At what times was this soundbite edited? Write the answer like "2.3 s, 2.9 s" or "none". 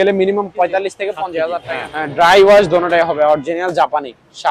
1.7 s